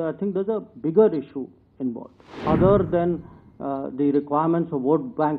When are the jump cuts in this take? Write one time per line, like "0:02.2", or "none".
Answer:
0:02.4